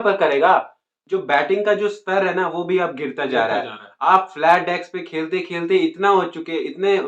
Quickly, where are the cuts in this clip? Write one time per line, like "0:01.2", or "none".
0:00.9